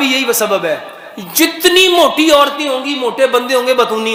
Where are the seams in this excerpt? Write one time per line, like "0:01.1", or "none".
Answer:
none